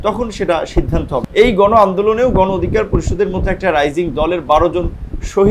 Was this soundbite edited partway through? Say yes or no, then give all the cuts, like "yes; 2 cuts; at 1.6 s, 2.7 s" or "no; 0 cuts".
yes; 1 cut; at 1.3 s